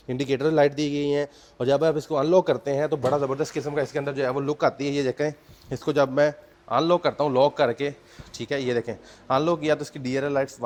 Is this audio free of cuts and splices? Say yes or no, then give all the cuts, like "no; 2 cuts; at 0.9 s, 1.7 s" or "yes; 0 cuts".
yes; 0 cuts